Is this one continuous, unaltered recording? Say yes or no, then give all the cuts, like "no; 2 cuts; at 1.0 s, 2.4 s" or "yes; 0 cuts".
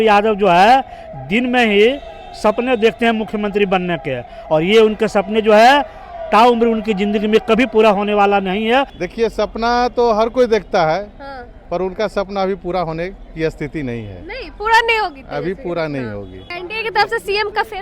no; 2 cuts; at 8.9 s, 16.5 s